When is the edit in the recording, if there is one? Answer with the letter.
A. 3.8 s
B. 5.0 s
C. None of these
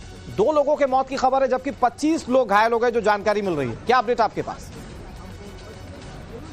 A